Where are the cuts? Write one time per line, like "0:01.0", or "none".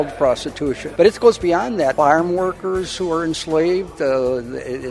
0:00.8
0:01.9